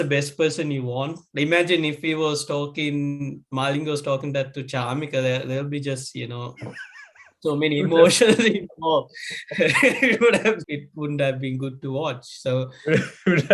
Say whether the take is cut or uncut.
cut